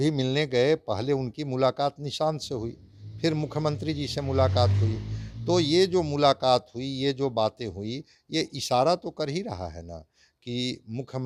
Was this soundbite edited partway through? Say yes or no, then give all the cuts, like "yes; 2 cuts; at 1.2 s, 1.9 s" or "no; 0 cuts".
no; 0 cuts